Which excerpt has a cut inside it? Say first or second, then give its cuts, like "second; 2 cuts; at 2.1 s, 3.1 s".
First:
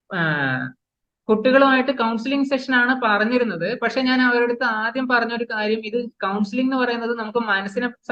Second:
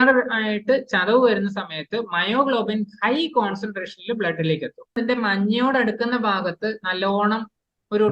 second; 1 cut; at 5.0 s